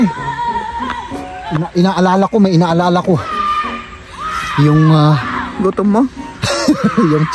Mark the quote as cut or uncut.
uncut